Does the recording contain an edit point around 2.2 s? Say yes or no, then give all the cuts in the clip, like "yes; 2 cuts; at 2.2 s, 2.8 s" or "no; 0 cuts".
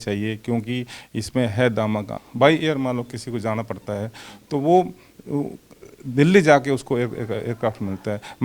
yes; 1 cut; at 2.2 s